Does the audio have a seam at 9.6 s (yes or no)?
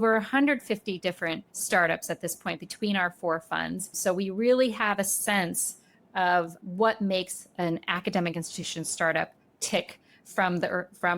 no